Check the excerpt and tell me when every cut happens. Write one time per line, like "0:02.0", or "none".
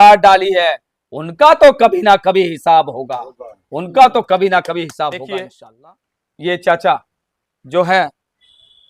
0:05.6

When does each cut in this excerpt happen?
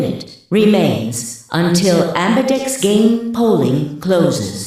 none

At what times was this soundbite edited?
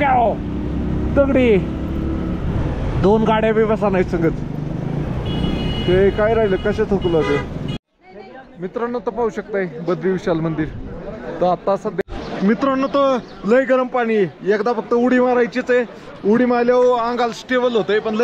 0:07.8
0:12.0

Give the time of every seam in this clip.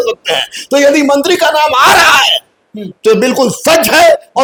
none

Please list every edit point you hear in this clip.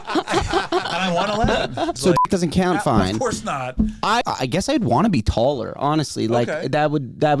0:02.0
0:04.2

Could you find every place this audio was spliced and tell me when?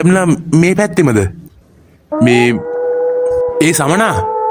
none

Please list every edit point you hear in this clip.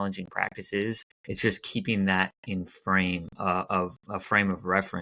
0:01.1

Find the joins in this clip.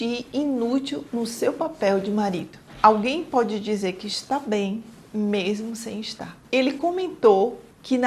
0:02.7
0:06.4

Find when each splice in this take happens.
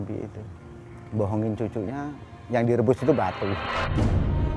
0:03.7

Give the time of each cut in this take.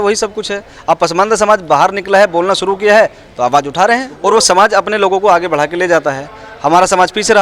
0:04.1

